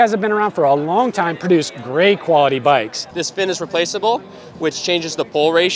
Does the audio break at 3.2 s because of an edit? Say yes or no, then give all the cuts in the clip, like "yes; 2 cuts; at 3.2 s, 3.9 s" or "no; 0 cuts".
yes; 1 cut; at 3.2 s